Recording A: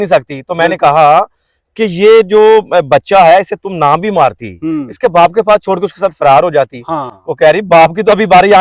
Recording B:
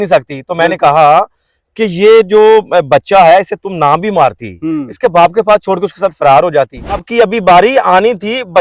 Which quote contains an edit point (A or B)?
B